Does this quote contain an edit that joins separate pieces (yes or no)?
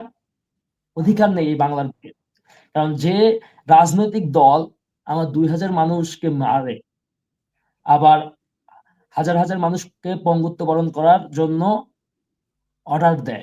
no